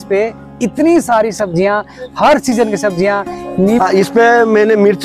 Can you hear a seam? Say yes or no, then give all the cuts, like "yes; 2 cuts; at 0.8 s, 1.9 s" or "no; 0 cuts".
yes; 1 cut; at 3.8 s